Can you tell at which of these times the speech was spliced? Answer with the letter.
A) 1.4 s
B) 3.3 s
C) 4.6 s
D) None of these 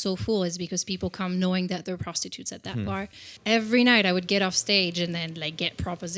B